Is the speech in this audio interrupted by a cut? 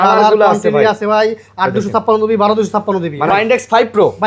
yes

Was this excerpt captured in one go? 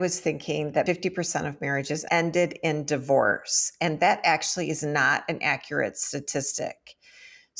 no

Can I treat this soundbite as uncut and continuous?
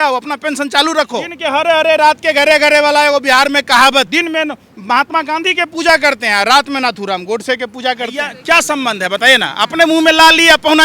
no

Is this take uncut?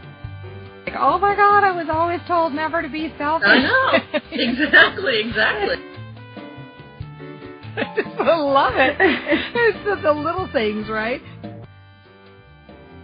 no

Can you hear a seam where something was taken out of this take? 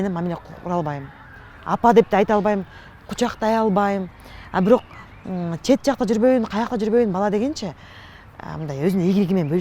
no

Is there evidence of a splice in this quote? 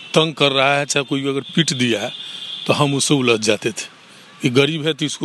no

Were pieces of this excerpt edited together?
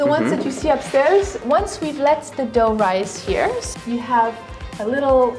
yes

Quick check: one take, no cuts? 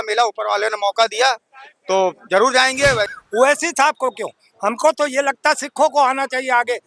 no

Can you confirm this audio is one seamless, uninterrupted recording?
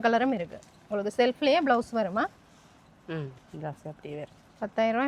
yes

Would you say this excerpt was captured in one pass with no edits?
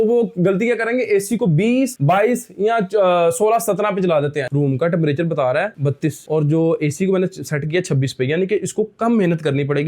no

